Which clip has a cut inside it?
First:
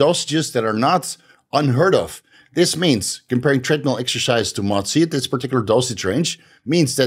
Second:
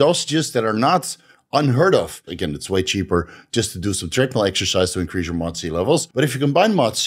second; 2 cuts; at 2.3 s, 6.1 s

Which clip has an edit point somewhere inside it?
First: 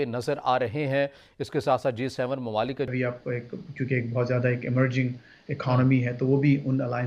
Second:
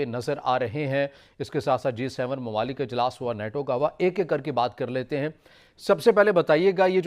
first; 1 cut; at 2.9 s

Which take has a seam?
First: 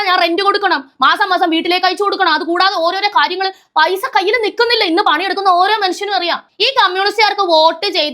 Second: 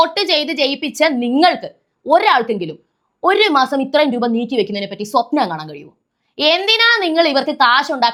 first; 1 cut; at 6.5 s

